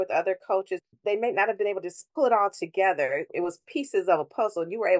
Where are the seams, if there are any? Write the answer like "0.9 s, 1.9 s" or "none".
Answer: 0.9 s, 2.0 s, 3.3 s